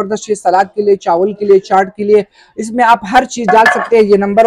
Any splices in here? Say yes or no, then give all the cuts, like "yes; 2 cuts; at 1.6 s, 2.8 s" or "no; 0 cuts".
no; 0 cuts